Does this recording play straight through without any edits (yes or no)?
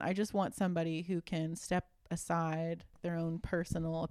no